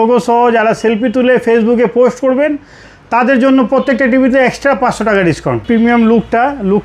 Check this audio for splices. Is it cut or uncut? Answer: cut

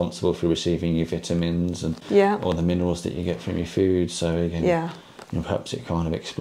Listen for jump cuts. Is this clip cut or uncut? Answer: uncut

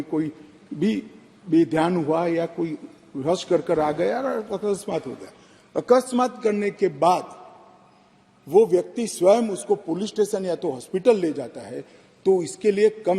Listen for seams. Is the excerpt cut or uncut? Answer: uncut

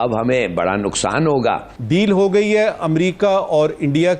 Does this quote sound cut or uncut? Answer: cut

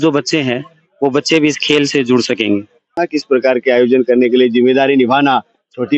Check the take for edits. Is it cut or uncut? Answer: cut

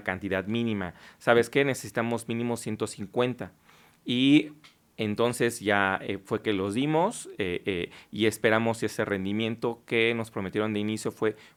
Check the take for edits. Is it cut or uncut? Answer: uncut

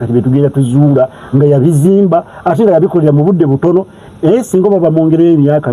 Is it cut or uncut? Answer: uncut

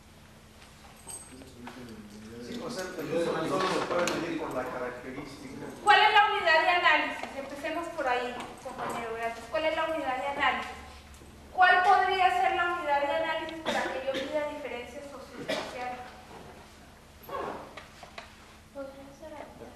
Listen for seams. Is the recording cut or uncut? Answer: cut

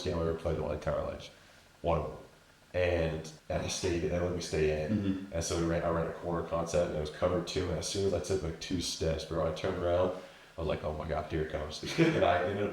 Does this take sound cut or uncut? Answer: cut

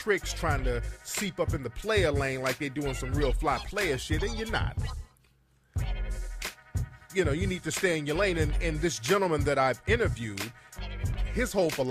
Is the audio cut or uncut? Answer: cut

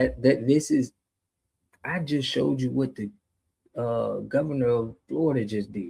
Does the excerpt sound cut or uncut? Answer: uncut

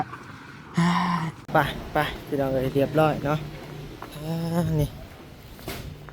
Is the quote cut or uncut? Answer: cut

